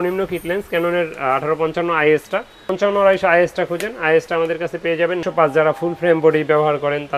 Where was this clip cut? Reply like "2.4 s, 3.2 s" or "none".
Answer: 2.7 s, 5.2 s